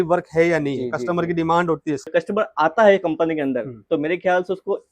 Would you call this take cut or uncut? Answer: cut